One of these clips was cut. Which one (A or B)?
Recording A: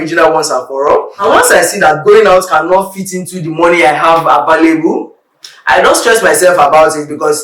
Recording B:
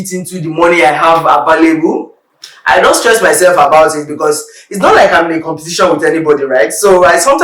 A